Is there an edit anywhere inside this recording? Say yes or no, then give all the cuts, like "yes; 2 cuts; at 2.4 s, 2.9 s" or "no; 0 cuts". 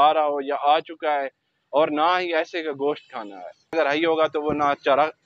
yes; 1 cut; at 3.7 s